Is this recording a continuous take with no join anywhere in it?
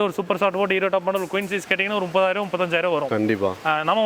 yes; 0 cuts

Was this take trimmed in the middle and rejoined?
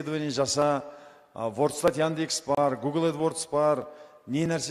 no; 0 cuts

